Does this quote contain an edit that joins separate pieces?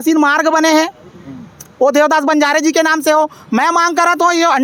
no; 0 cuts

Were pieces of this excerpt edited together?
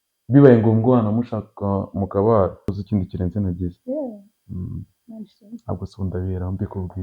yes; 1 cut; at 2.8 s

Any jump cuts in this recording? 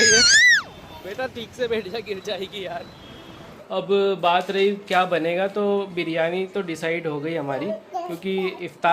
yes; 1 cut; at 3.5 s

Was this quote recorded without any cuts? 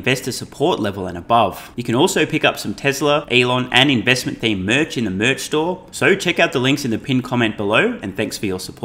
no; 3 cuts; at 1.7 s, 3.3 s, 5.9 s

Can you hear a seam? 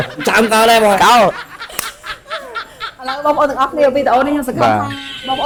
no; 0 cuts

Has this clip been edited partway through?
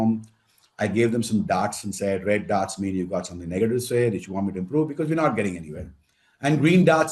no; 0 cuts

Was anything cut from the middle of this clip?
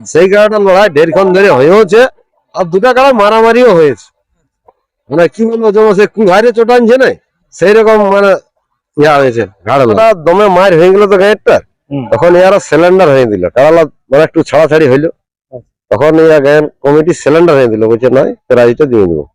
yes; 1 cut; at 10.0 s

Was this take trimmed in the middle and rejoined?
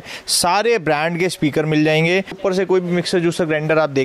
yes; 1 cut; at 2.4 s

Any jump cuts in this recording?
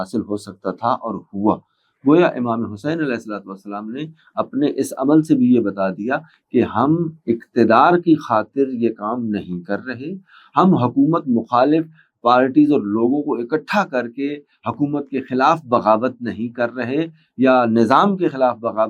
no; 0 cuts

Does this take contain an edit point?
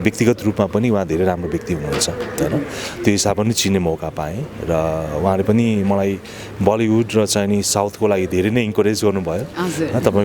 no; 0 cuts

